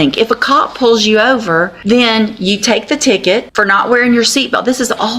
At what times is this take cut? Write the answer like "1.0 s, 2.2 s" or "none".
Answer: 1.8 s, 3.5 s